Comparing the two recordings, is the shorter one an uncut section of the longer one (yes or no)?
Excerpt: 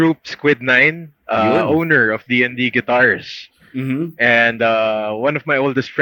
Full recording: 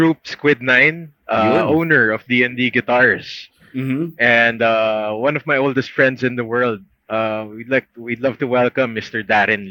yes